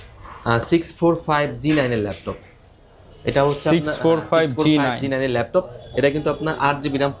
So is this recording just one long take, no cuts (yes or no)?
yes